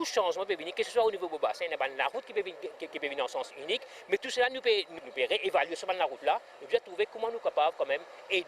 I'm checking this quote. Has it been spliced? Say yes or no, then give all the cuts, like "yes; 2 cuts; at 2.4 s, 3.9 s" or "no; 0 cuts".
no; 0 cuts